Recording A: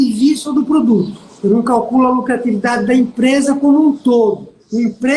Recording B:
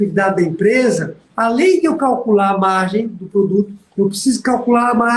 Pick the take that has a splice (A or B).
B